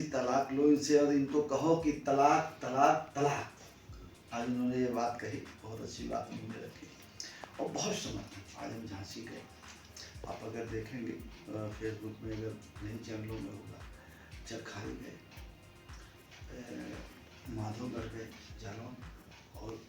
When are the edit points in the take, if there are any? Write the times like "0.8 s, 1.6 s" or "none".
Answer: none